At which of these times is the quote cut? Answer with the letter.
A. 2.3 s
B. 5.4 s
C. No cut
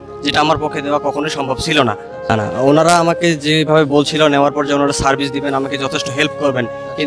A